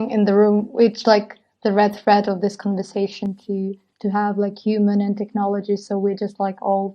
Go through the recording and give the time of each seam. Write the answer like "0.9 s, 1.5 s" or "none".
3.9 s

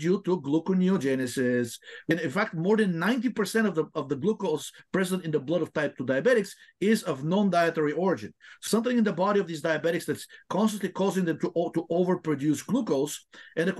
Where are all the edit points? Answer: 2.1 s, 8.6 s

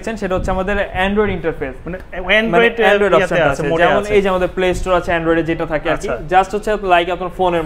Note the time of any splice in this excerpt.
none

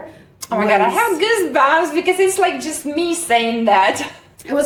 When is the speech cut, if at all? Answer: none

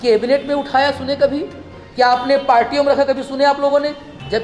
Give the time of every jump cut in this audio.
none

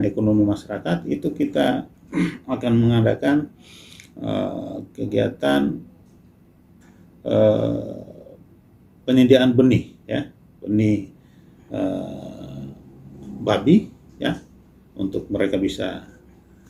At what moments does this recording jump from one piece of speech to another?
none

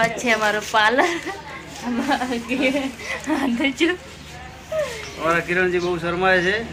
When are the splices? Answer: none

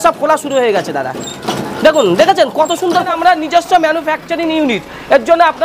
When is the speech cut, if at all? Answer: 3.1 s

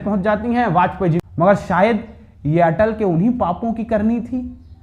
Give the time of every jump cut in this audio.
1.2 s

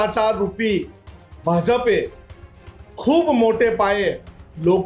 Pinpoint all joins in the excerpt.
none

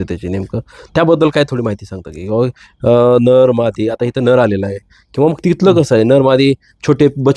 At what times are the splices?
none

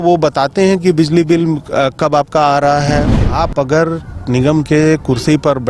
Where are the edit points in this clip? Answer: 3.1 s

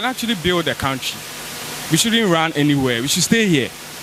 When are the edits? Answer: none

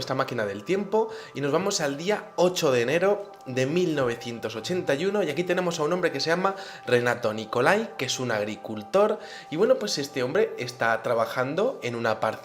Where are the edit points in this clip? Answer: 4.3 s

